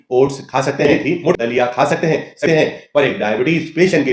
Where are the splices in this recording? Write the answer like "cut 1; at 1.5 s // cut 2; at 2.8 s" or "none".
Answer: cut 1; at 1.3 s // cut 2; at 2.5 s